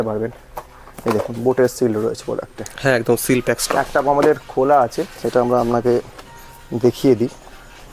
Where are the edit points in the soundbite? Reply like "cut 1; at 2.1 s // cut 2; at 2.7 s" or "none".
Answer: none